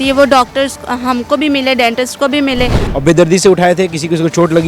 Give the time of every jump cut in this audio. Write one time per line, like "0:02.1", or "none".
0:02.8